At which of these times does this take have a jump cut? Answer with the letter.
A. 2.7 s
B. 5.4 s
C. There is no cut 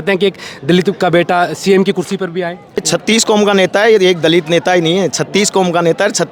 A